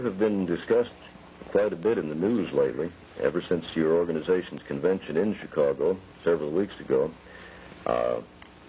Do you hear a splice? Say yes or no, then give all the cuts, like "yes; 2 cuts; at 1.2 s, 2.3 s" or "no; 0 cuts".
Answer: yes; 1 cut; at 2.9 s